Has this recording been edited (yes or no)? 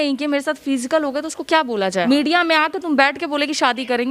yes